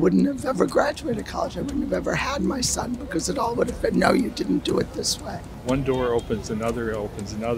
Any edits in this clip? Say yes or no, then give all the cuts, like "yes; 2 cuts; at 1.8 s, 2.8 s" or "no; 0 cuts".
yes; 1 cut; at 5.5 s